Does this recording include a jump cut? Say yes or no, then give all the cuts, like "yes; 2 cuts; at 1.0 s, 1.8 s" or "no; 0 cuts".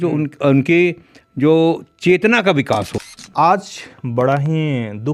yes; 1 cut; at 3.0 s